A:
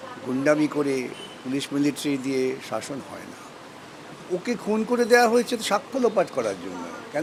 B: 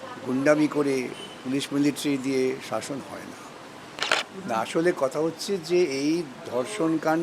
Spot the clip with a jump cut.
B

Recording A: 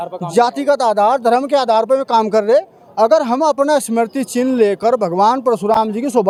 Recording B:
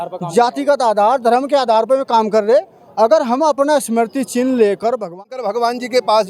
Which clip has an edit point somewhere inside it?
B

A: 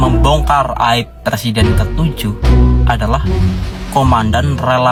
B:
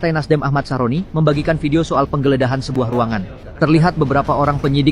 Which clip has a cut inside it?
B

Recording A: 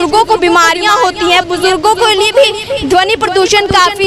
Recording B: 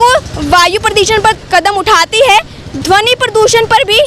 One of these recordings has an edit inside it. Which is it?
B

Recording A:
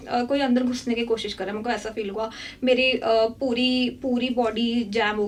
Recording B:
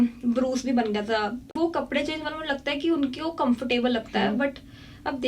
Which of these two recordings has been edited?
B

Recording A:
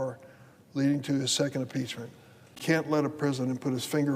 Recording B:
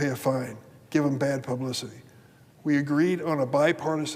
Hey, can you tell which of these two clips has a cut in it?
A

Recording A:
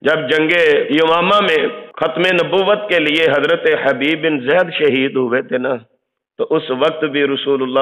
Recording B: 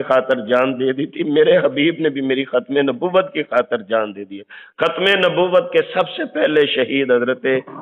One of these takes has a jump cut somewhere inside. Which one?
A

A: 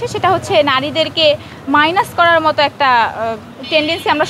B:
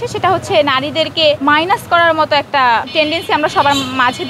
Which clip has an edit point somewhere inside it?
B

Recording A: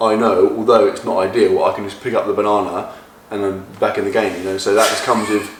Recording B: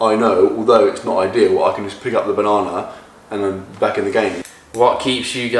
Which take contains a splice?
B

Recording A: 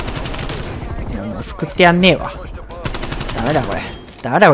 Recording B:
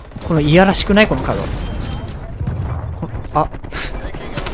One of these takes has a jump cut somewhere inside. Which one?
A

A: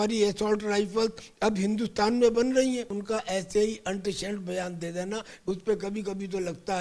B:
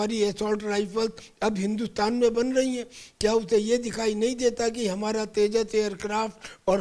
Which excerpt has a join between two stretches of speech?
A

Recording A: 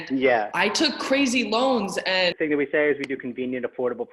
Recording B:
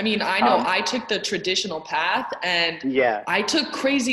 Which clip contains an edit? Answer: A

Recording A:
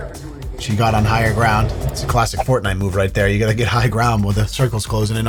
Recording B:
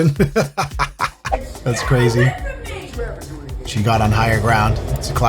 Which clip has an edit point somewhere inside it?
B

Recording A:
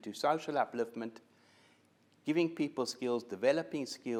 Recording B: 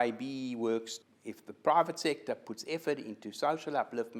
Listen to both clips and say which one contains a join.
B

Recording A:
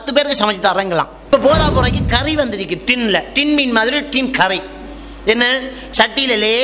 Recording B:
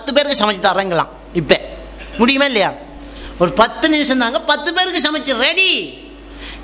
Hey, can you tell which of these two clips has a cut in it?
A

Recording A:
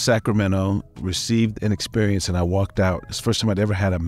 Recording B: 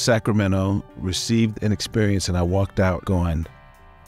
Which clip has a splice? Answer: B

